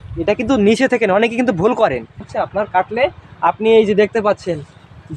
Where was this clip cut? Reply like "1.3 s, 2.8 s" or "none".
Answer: 2.2 s